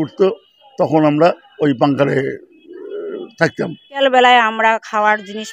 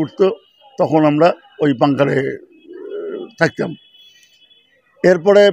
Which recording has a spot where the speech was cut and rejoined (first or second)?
first